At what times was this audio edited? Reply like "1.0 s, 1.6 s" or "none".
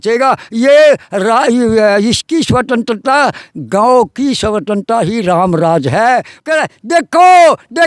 6.3 s